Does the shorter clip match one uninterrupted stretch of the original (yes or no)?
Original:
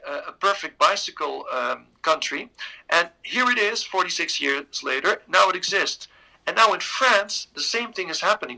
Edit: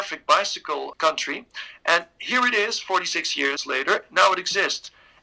no